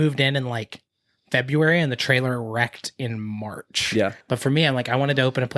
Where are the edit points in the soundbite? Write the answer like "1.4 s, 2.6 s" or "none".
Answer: 4.2 s